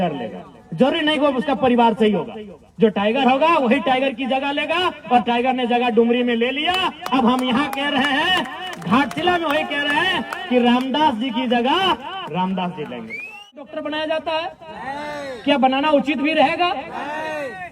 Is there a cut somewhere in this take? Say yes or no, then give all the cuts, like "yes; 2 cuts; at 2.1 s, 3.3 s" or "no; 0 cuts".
yes; 1 cut; at 13.6 s